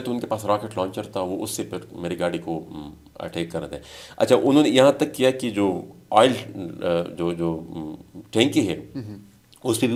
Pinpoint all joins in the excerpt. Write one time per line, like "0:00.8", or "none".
none